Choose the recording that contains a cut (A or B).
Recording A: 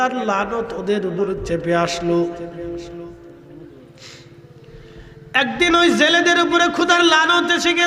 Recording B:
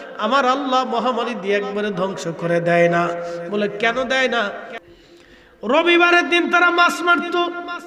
B